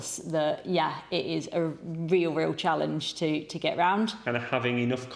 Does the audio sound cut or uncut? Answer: cut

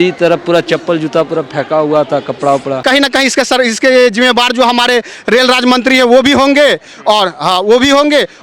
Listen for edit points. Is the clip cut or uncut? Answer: cut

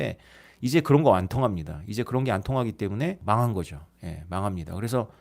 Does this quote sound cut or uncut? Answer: cut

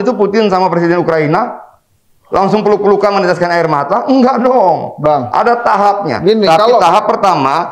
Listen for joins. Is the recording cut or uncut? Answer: uncut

